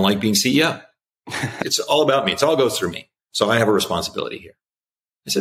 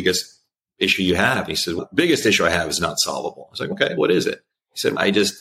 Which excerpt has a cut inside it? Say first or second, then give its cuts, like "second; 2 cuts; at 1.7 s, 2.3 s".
first; 1 cut; at 1.6 s